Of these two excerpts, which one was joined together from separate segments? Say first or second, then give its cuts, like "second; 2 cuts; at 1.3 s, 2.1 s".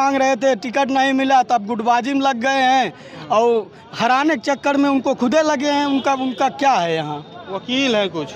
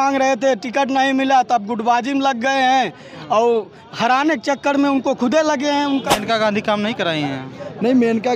second; 1 cut; at 6.2 s